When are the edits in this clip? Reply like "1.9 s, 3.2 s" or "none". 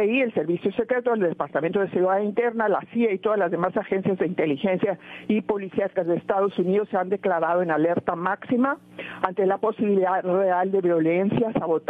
none

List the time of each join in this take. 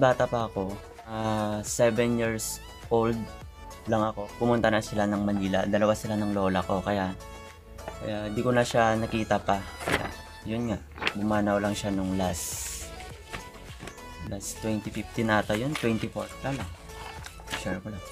1.2 s

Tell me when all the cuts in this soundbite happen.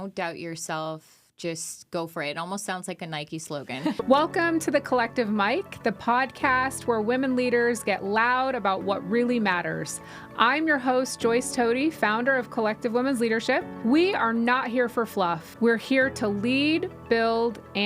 4.0 s

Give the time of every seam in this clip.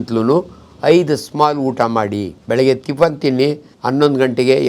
2.3 s, 3.7 s

